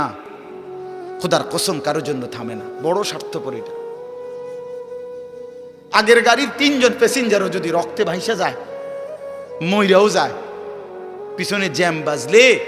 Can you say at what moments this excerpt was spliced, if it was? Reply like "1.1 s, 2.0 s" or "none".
3.4 s, 5.9 s